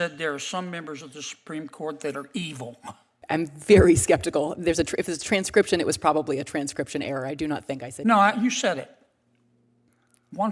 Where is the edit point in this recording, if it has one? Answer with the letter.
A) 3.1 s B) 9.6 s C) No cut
A